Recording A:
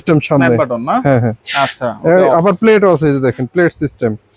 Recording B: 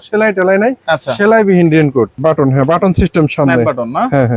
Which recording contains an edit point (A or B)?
B